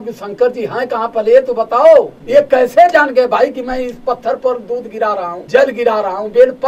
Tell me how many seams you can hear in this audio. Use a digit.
2